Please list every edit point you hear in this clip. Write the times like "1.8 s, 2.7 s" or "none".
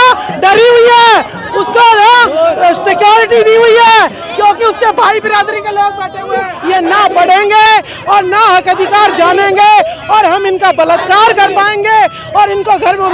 6.5 s